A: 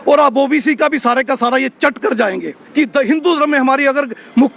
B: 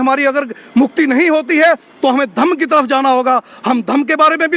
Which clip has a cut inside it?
A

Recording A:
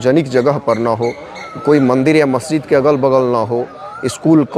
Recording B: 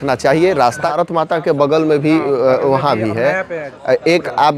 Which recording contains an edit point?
B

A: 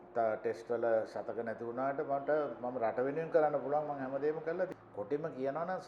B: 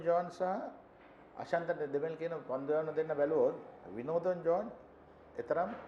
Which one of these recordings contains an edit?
A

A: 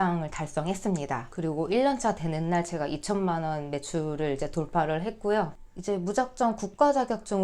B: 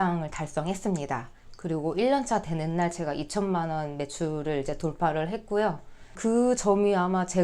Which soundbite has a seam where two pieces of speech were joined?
A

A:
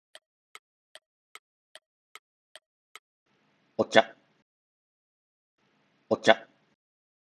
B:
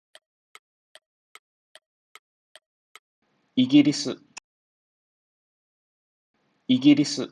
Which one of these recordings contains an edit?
B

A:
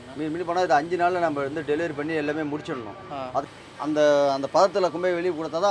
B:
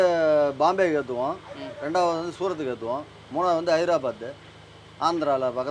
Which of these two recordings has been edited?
A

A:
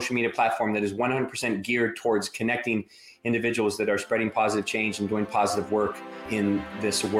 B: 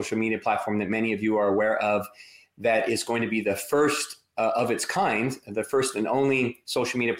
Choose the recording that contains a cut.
A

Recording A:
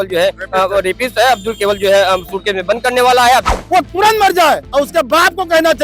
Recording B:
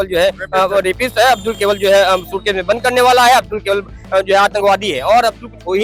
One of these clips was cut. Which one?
A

